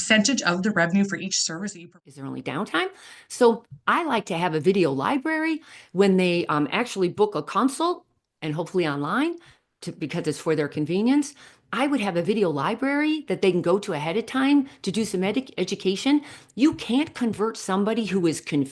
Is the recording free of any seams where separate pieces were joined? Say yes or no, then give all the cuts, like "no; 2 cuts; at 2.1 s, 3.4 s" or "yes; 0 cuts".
no; 1 cut; at 1.9 s